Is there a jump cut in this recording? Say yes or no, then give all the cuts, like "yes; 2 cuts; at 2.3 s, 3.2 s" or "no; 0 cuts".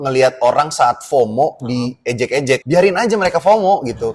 yes; 1 cut; at 2.6 s